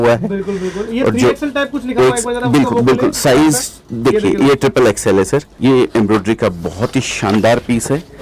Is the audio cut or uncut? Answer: cut